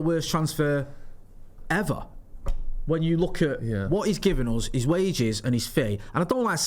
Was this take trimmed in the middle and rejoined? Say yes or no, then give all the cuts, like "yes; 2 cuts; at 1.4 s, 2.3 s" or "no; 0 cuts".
no; 0 cuts